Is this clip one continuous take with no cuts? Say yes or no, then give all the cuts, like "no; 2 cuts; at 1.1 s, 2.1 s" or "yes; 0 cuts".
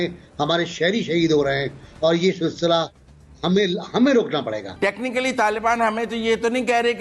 no; 1 cut; at 4.6 s